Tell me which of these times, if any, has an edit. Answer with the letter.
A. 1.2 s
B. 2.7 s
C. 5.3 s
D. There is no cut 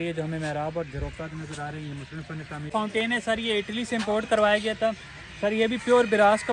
B